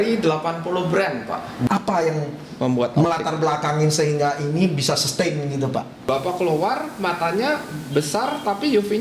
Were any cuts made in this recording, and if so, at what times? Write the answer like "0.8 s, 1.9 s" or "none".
1.7 s, 5.9 s